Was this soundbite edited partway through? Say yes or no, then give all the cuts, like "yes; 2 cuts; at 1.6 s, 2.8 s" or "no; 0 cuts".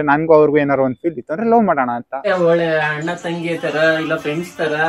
yes; 1 cut; at 2.2 s